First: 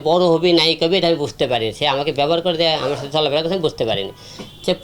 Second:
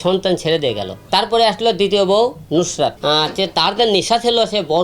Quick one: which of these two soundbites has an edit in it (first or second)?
second